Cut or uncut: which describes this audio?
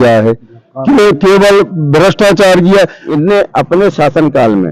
cut